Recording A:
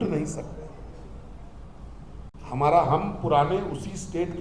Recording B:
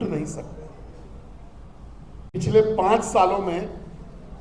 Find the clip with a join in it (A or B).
B